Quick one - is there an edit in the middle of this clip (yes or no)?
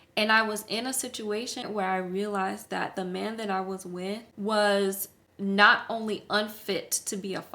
yes